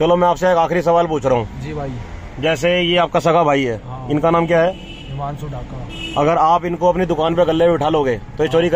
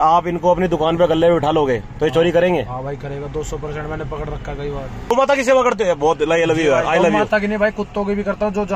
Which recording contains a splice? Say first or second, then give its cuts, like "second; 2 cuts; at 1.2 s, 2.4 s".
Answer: second; 1 cut; at 5.1 s